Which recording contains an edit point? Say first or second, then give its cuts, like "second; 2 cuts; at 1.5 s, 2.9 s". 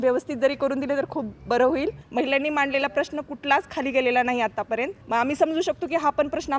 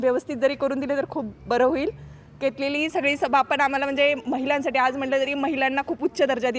first; 2 cuts; at 2.0 s, 5.0 s